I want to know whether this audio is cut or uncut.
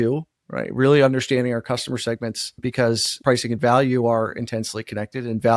cut